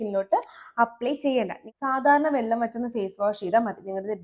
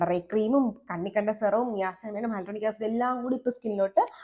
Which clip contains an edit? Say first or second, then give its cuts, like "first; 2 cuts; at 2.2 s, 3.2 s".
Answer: first; 1 cut; at 1.6 s